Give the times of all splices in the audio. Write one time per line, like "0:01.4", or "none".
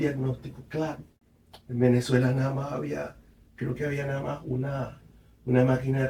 0:01.1

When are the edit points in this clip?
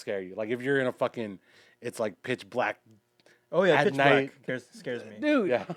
none

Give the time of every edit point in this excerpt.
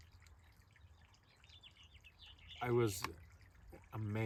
none

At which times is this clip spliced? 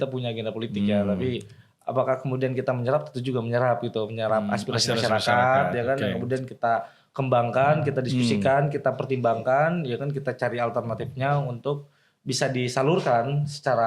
none

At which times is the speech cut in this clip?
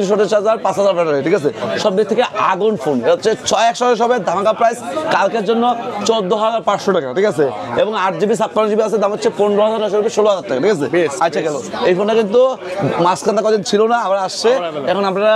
none

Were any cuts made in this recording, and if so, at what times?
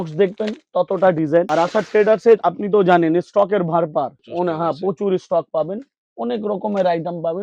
none

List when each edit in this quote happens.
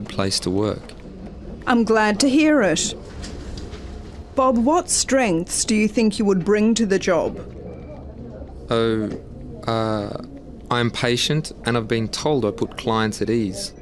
0:03.1

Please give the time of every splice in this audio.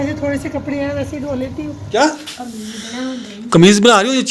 0:01.8

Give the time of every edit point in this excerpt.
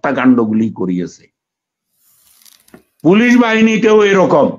none

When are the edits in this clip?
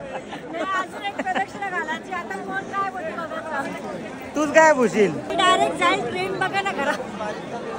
0:05.2

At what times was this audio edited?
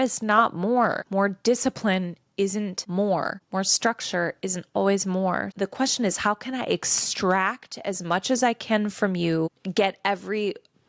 0:01.0
0:02.8
0:03.4
0:05.5
0:09.6

